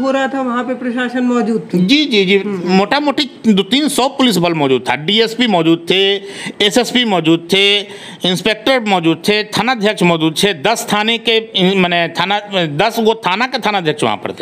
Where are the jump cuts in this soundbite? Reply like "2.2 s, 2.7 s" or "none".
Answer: none

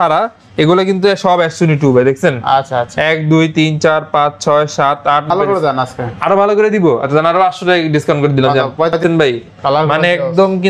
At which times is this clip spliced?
5.3 s, 9.0 s

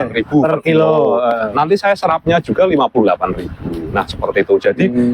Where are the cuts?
none

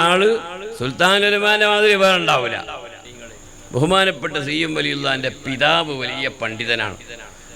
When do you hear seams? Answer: 3.0 s

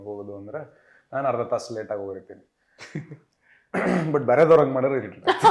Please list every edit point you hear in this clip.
none

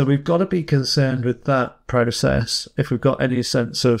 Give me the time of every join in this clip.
none

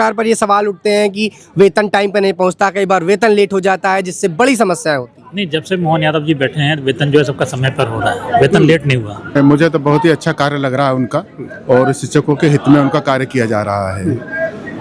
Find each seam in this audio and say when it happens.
9.3 s

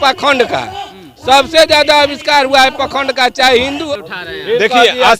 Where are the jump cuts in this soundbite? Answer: 3.8 s

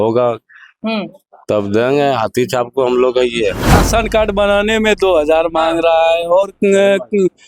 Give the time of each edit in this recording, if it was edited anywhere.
3.8 s

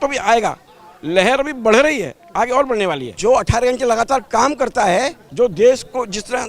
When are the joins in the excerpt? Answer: 3.1 s, 5.2 s

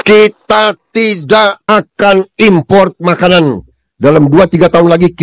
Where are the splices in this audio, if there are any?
none

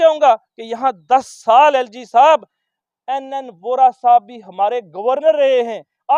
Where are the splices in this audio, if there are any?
none

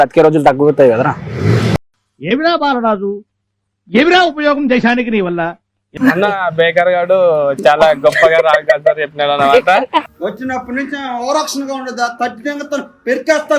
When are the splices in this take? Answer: 1.7 s, 6.0 s

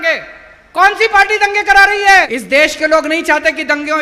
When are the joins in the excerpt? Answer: 2.3 s

